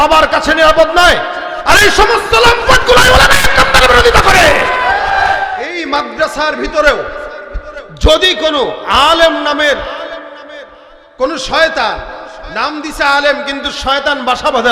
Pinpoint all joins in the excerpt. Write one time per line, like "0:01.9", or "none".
0:05.7